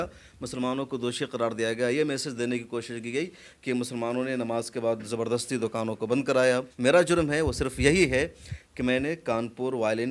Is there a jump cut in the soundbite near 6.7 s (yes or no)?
yes